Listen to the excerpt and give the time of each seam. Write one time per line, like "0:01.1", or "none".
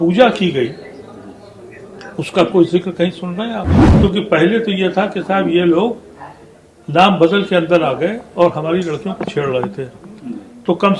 0:03.8